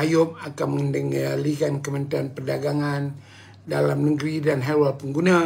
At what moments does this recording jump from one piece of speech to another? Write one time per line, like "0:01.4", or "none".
none